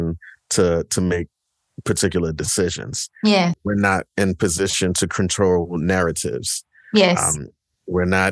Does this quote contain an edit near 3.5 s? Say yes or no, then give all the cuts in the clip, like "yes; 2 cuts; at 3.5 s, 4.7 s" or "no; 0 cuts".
yes; 1 cut; at 3.5 s